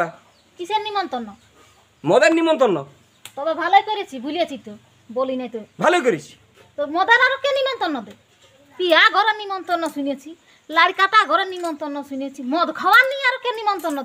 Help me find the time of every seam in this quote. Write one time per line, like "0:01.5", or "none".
0:12.4